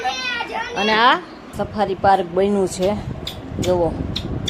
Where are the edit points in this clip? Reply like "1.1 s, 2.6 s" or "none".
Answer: 1.5 s

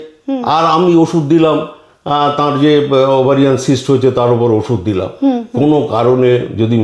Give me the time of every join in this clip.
none

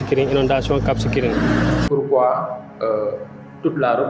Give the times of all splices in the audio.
1.9 s

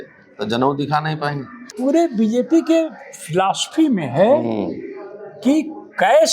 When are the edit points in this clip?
1.7 s

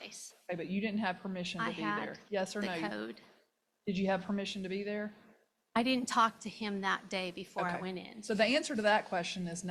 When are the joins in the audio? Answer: none

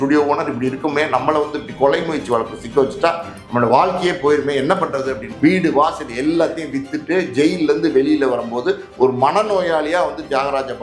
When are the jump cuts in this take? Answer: 5.3 s

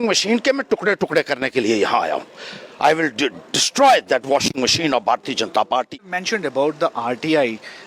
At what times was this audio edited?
5.9 s

